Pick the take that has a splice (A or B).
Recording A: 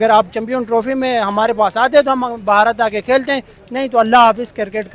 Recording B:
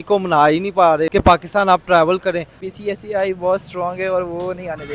B